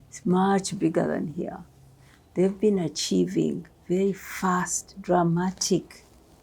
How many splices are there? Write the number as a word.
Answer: zero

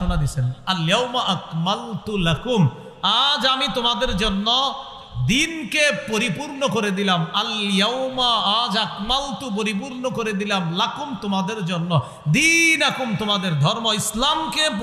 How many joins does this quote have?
zero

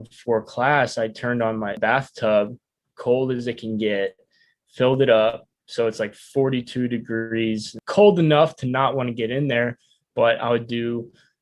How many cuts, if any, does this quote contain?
two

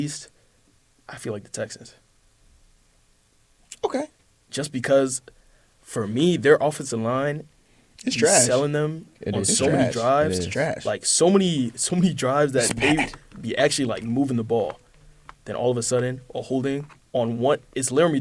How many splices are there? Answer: zero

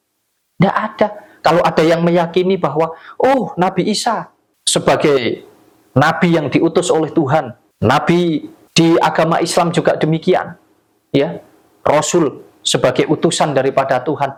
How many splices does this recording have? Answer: zero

